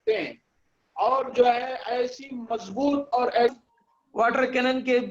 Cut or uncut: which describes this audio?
cut